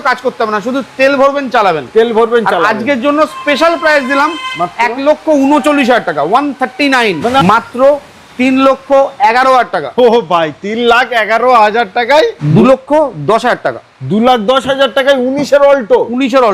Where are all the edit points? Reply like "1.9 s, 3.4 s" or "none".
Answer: 7.4 s, 12.4 s

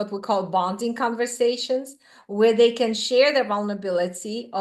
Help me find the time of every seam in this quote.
none

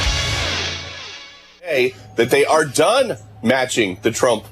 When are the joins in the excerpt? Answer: 1.7 s

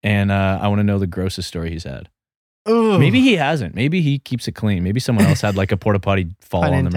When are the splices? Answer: none

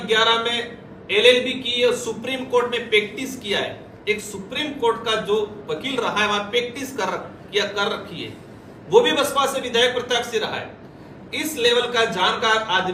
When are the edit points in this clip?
none

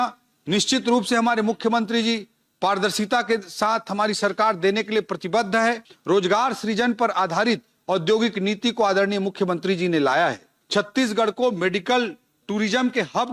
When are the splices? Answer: 5.9 s, 10.5 s

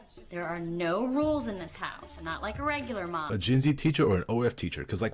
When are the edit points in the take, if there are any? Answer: 3.3 s

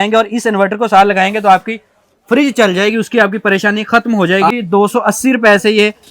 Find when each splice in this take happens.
4.5 s

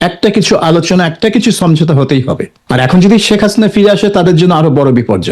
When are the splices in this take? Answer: 2.5 s

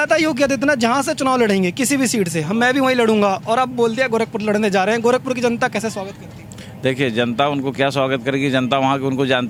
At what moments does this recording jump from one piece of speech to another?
none

